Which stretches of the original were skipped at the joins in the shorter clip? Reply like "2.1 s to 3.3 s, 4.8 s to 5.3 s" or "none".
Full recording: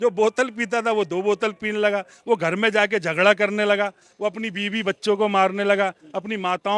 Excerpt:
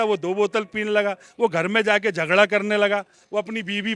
none